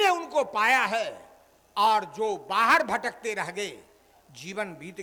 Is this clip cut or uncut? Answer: uncut